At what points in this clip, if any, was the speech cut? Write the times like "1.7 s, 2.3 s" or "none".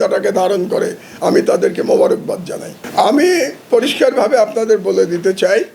none